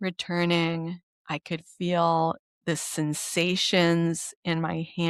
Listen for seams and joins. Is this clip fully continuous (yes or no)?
yes